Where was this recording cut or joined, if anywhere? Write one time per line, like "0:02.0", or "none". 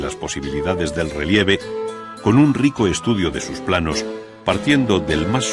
none